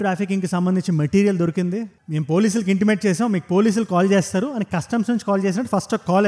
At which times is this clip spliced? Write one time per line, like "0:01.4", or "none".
none